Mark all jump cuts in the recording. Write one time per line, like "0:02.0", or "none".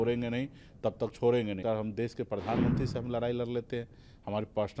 0:01.6